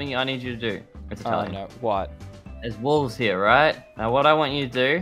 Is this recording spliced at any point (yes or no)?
yes